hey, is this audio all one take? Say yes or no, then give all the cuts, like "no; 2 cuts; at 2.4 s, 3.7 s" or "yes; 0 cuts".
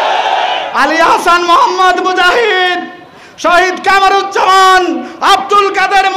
yes; 0 cuts